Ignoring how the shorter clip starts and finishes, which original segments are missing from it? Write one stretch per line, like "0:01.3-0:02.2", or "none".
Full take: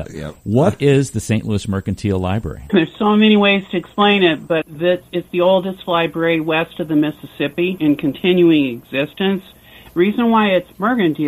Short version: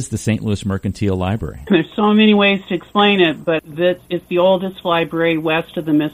none